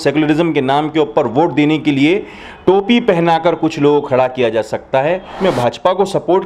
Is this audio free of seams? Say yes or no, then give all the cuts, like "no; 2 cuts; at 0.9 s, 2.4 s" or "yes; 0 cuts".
no; 1 cut; at 5.4 s